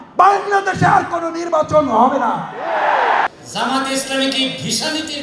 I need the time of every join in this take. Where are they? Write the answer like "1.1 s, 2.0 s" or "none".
3.3 s

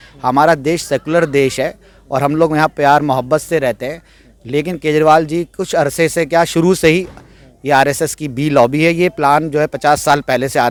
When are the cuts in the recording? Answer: none

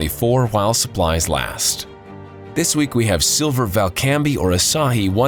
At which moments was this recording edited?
none

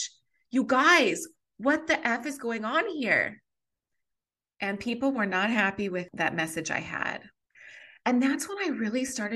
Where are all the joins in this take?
6.1 s, 7.4 s

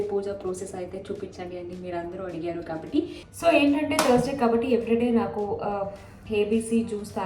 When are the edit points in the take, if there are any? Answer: 3.2 s

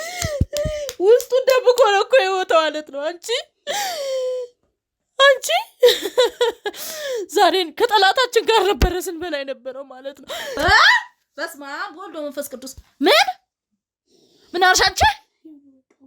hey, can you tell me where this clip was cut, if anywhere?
10.6 s

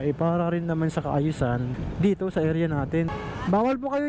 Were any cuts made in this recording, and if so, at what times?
1.8 s, 3.1 s

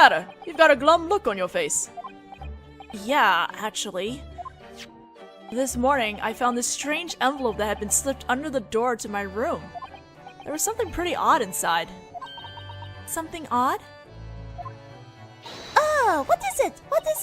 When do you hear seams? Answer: 3.0 s

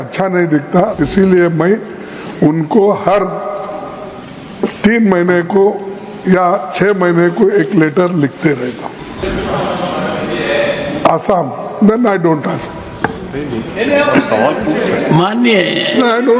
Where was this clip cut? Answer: 1.0 s, 9.2 s

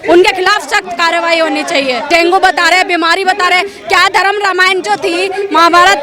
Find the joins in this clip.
2.1 s

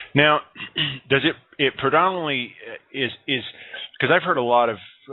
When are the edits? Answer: 1.4 s

